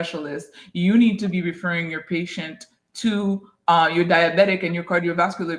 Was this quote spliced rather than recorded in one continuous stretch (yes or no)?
no